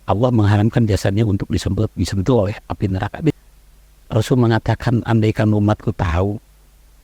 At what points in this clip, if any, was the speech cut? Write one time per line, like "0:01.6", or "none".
0:03.4

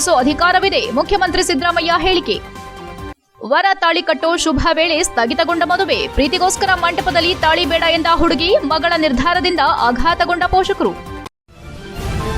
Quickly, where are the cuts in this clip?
0:11.1

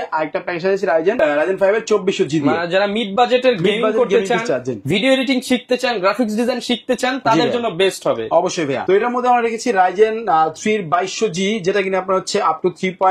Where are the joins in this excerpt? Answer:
none

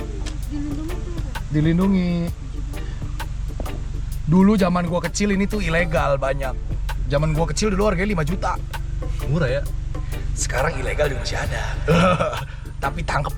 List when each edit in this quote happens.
none

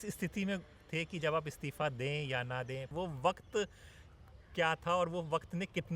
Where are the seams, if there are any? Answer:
0:02.9

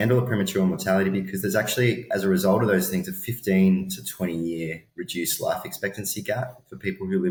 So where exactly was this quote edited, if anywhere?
none

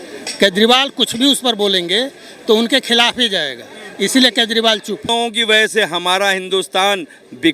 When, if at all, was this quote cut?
0:05.1

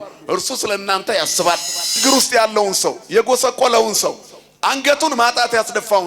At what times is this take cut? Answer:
0:02.0

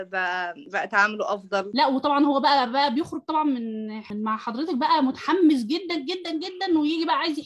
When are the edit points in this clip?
0:01.7

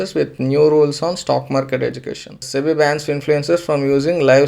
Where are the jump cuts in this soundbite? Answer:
0:02.5

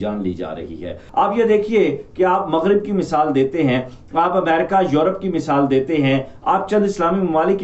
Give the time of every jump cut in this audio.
0:01.0

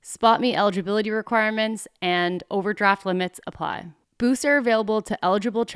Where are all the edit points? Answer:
none

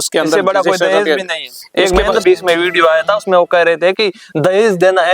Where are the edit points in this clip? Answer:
0:02.2

